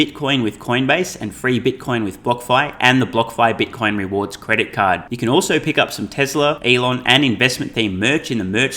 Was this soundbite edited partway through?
yes; 1 cut; at 6.6 s

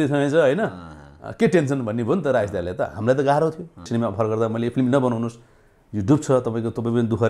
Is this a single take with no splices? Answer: no; 1 cut; at 3.9 s

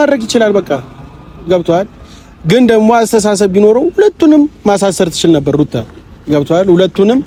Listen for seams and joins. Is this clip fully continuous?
yes; 0 cuts

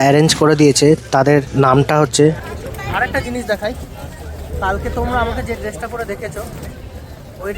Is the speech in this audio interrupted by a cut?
yes; 1 cut; at 2.4 s

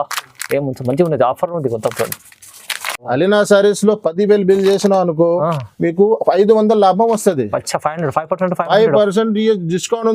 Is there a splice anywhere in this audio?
yes; 1 cut; at 3.0 s

